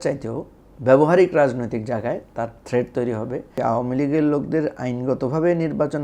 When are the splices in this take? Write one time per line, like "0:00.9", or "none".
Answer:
0:03.5